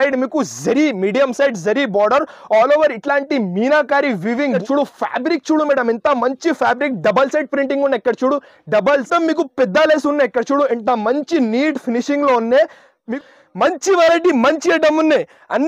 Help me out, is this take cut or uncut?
cut